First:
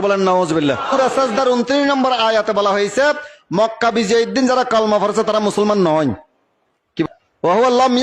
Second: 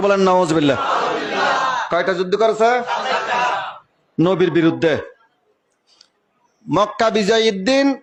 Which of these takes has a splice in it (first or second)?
first